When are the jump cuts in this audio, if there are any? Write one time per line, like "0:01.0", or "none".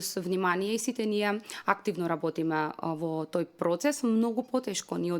none